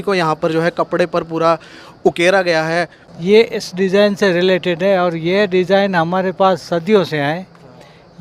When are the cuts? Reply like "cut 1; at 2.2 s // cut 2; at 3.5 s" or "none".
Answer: cut 1; at 3.0 s